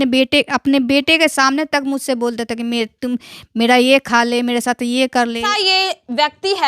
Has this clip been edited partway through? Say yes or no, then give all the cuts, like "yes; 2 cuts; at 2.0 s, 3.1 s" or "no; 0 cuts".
yes; 1 cut; at 5.5 s